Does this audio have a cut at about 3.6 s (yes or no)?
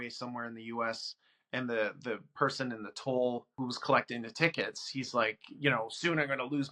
yes